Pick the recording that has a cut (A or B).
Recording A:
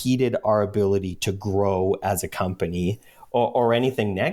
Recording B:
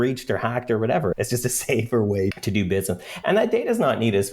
B